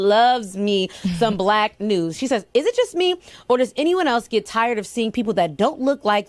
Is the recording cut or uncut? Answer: uncut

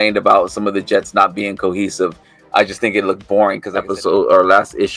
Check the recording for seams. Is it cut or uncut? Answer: cut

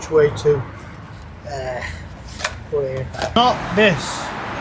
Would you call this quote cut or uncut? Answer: cut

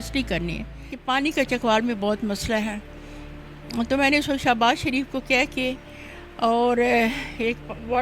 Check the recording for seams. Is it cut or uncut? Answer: cut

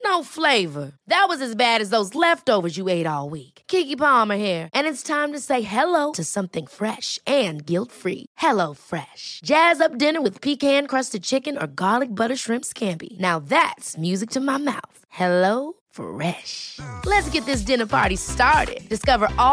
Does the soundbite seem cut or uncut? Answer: uncut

